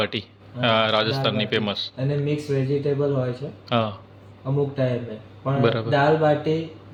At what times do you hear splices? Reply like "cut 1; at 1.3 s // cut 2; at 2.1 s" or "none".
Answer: none